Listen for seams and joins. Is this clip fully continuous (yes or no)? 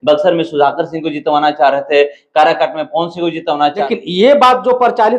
no